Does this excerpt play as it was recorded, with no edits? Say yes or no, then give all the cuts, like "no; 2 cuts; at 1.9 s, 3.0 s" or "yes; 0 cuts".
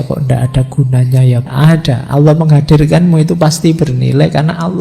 no; 1 cut; at 1.5 s